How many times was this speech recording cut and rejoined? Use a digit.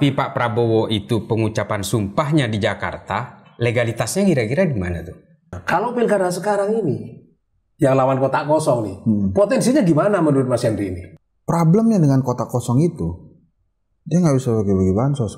2